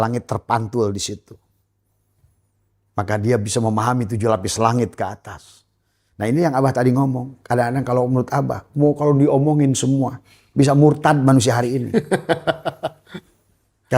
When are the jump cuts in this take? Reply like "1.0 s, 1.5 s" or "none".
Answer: none